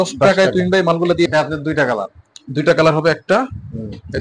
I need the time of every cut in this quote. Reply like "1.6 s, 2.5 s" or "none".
1.3 s